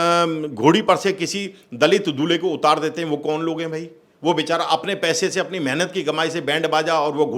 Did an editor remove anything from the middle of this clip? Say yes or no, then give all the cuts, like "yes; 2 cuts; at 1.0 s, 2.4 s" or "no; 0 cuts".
no; 0 cuts